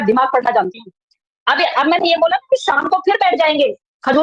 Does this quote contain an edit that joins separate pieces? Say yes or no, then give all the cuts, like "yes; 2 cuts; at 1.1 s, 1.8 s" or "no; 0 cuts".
no; 0 cuts